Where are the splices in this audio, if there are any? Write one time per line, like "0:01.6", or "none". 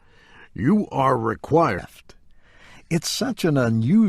none